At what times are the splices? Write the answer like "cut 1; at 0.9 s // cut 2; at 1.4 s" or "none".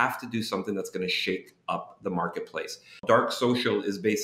cut 1; at 3.0 s